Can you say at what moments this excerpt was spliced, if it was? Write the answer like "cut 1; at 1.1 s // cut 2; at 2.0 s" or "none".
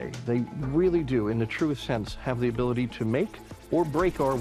none